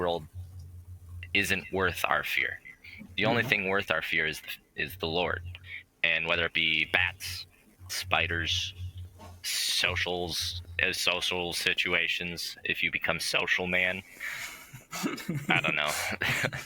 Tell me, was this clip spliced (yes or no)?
no